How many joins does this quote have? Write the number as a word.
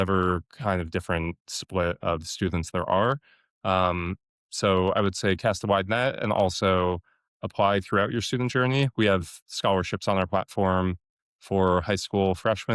zero